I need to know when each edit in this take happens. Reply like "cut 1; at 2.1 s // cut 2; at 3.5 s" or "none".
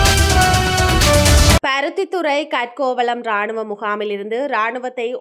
cut 1; at 1.4 s